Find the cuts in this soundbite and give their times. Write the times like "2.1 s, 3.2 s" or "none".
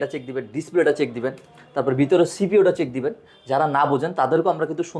none